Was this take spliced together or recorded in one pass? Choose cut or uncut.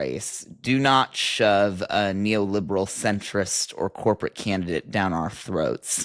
uncut